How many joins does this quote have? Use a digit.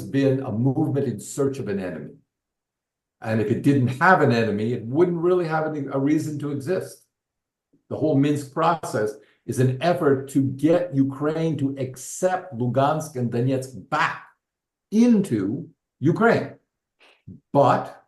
1